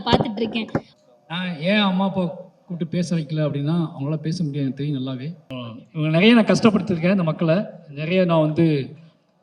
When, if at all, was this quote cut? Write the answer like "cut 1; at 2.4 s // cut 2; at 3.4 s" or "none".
cut 1; at 0.9 s // cut 2; at 5.4 s